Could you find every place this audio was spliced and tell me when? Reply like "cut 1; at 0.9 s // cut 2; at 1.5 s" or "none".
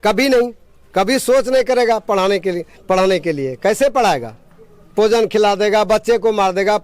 none

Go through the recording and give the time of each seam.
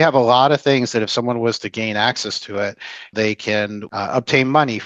cut 1; at 3.1 s // cut 2; at 3.8 s

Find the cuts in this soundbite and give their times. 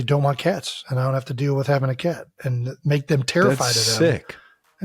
none

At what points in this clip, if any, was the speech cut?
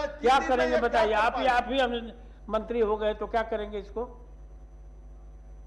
none

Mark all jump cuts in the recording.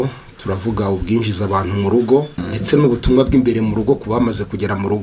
cut 1; at 2.5 s

